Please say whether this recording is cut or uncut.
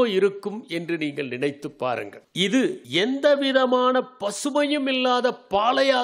cut